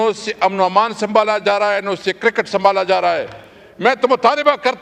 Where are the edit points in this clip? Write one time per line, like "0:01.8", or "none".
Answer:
none